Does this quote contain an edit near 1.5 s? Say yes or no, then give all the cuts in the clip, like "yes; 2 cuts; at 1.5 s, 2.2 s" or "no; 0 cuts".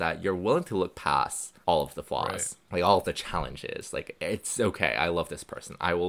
yes; 2 cuts; at 1.5 s, 2.5 s